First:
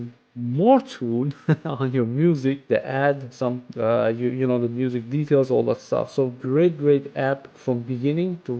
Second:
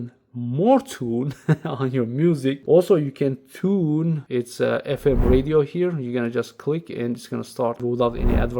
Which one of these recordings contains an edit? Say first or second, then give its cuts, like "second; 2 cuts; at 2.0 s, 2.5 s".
second; 3 cuts; at 2.6 s, 4.2 s, 7.8 s